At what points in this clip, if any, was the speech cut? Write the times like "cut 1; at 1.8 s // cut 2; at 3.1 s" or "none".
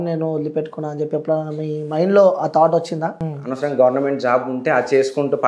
cut 1; at 3.3 s